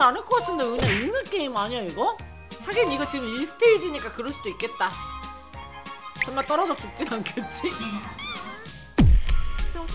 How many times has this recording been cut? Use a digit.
1